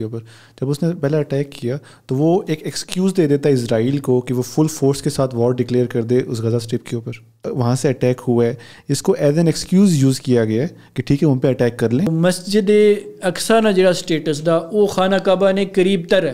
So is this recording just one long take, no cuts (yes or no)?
no